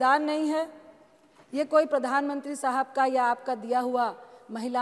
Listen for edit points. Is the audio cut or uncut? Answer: uncut